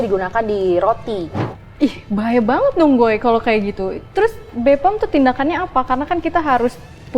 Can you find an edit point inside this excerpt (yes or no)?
yes